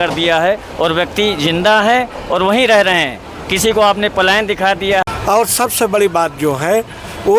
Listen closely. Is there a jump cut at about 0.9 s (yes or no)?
no